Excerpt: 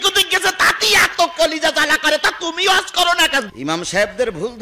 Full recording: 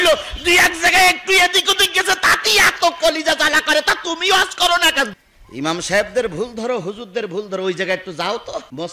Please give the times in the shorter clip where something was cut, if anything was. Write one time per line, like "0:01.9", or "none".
0:03.5